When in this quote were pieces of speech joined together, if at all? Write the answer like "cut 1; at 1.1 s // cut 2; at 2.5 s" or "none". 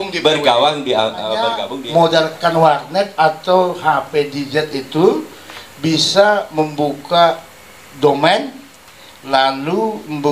cut 1; at 1.7 s